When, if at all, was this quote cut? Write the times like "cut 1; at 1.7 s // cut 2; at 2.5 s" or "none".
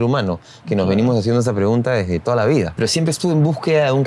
cut 1; at 2.7 s